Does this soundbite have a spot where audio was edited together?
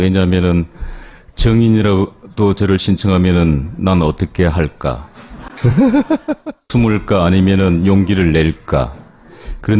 yes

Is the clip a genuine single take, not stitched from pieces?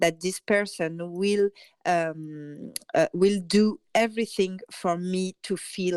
yes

